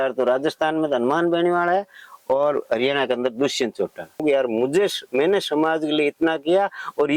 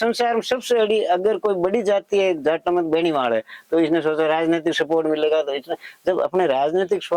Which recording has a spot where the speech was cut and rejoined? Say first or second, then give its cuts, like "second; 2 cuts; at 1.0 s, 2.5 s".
first; 1 cut; at 4.2 s